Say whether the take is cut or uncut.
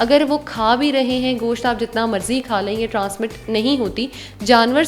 uncut